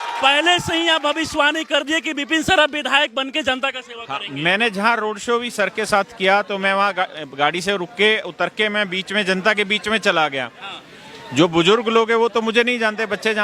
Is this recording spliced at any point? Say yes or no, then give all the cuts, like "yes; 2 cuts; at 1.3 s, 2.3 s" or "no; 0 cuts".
no; 0 cuts